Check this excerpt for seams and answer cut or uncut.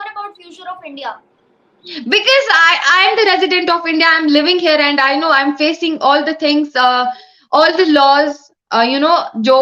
uncut